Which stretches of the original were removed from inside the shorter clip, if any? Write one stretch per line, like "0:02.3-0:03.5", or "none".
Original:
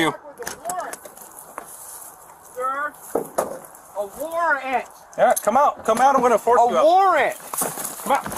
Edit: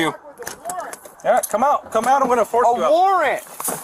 0:01.1-0:05.0